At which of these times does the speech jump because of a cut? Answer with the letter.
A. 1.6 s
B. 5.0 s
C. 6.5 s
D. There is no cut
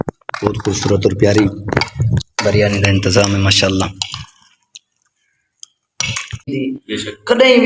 C